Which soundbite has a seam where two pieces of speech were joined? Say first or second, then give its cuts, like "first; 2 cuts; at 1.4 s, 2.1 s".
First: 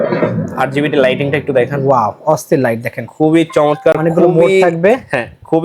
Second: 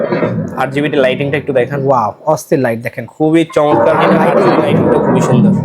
second; 1 cut; at 3.9 s